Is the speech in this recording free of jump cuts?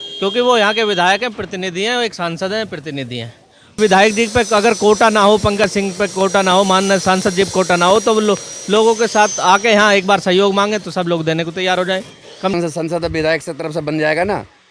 no; 2 cuts; at 3.8 s, 12.5 s

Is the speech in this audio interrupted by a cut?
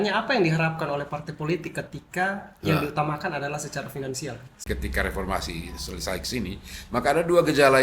yes; 1 cut; at 4.6 s

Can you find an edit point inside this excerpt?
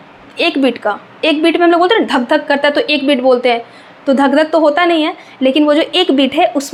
no; 0 cuts

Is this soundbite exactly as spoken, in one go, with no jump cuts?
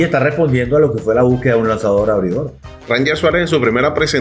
no; 1 cut; at 2.6 s

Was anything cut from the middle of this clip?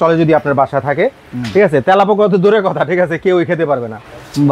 no; 0 cuts

